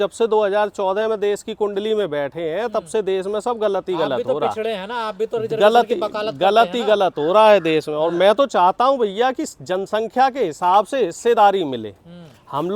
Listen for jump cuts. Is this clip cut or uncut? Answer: uncut